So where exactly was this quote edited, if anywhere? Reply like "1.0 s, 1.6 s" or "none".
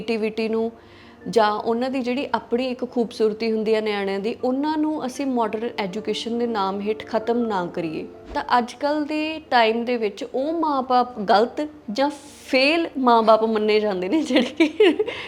8.3 s

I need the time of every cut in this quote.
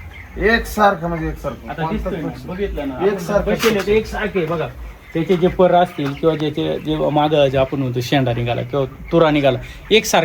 none

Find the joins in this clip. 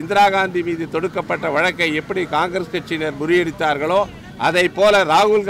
none

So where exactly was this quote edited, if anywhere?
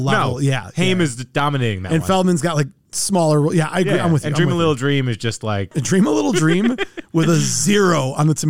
5.7 s

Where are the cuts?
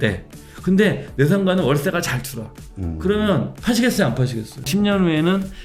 4.6 s

